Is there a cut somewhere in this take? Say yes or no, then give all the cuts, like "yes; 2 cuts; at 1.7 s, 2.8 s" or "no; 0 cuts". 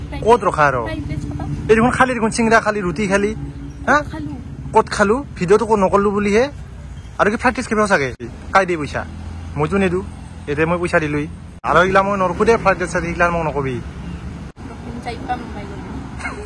no; 0 cuts